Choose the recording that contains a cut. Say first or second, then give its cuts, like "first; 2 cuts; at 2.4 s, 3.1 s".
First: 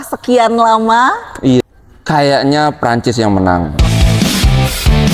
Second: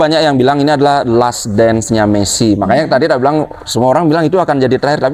first; 2 cuts; at 1.6 s, 3.8 s